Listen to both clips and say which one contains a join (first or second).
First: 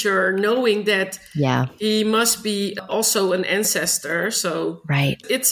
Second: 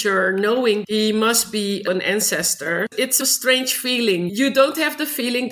second